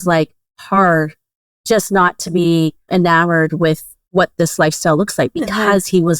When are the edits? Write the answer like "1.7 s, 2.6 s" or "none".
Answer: 2.8 s, 3.9 s